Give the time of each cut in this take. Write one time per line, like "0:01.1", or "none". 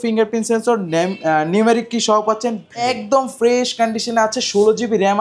0:02.8